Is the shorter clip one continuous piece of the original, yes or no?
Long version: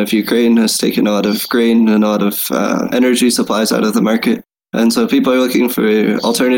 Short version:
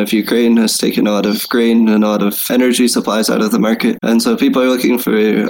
no